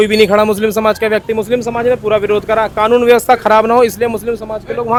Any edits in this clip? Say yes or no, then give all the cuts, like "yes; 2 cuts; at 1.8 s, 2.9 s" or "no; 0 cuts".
no; 0 cuts